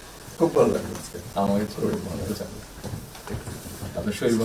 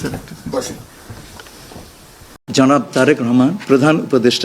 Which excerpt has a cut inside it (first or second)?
second